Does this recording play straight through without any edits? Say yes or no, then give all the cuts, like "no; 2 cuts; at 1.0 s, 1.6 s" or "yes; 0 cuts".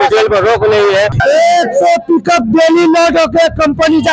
no; 1 cut; at 1.2 s